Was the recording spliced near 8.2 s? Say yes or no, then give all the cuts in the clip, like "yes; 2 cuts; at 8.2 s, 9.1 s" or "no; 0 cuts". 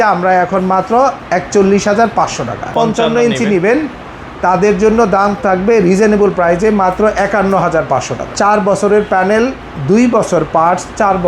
yes; 2 cuts; at 2.7 s, 8.2 s